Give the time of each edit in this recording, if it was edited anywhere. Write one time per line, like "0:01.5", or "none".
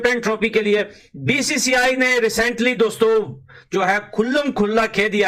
none